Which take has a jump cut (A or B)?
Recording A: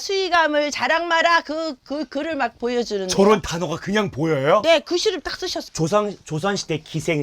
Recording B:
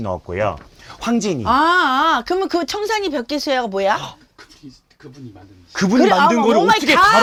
A